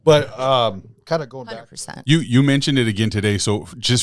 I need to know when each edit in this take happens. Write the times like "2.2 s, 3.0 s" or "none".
1.5 s